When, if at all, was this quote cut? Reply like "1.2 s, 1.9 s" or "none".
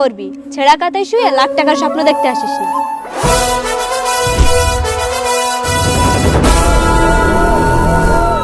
3.0 s